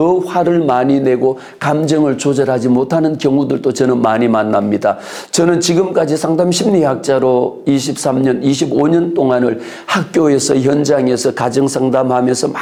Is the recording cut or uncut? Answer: uncut